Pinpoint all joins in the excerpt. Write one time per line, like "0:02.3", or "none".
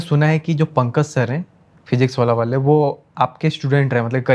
none